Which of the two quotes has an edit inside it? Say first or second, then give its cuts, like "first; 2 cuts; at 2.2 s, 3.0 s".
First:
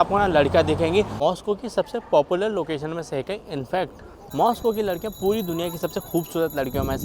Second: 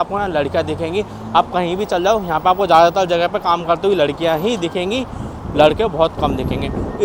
first; 2 cuts; at 1.1 s, 4.1 s